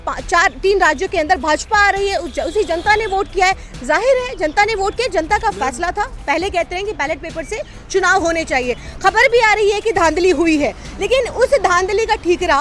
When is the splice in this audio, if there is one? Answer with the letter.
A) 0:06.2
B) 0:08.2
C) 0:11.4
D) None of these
A